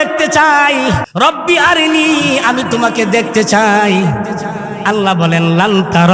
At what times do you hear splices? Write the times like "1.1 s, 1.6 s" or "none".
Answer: 1.1 s